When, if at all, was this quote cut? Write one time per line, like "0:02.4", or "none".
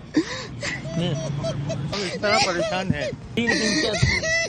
0:01.9
0:03.4